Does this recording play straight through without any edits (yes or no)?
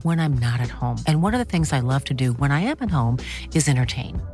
yes